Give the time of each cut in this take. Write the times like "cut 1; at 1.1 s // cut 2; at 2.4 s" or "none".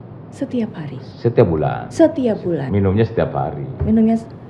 none